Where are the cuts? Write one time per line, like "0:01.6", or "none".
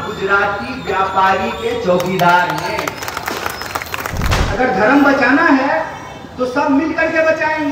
0:04.3